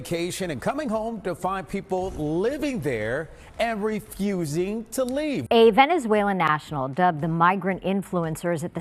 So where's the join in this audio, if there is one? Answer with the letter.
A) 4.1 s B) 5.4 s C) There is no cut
B